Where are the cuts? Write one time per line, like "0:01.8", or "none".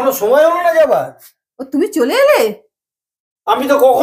none